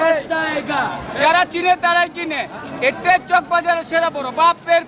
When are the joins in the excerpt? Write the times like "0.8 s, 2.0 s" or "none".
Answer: 1.1 s